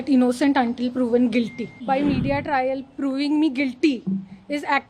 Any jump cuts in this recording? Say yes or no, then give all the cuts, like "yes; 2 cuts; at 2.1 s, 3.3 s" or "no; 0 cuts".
yes; 1 cut; at 1.8 s